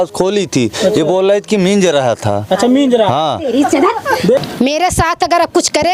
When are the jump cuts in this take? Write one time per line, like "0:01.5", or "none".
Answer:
0:04.4

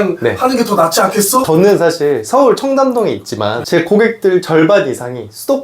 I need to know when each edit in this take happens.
0:01.5

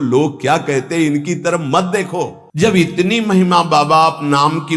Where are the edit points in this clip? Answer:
0:02.4

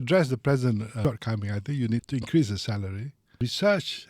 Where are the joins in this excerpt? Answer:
0:00.9
0:02.1
0:03.4

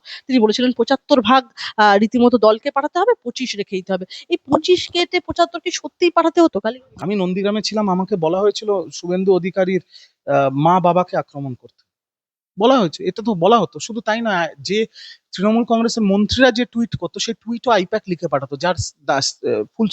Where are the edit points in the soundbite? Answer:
0:06.9

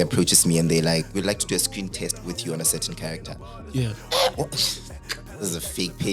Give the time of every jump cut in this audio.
0:01.1

